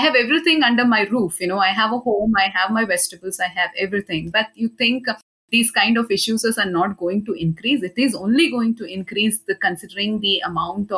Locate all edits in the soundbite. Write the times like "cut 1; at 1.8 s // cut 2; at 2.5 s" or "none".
none